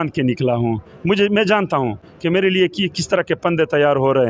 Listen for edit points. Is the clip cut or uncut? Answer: uncut